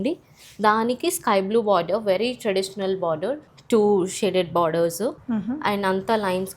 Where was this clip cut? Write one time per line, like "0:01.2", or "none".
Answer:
0:03.5
0:05.2